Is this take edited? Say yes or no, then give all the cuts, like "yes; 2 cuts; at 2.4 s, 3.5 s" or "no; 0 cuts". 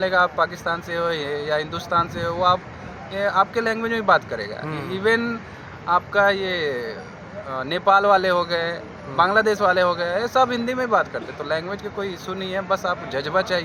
no; 0 cuts